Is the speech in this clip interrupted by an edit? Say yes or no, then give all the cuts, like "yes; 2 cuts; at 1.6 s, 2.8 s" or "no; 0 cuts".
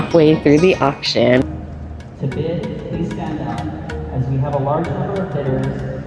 yes; 1 cut; at 1.4 s